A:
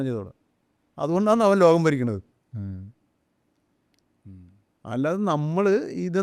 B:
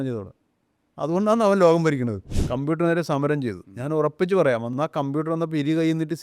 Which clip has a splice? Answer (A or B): B